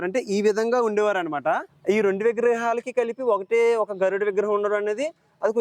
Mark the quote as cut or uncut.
cut